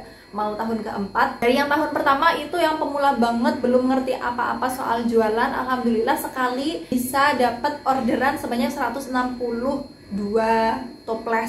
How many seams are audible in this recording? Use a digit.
2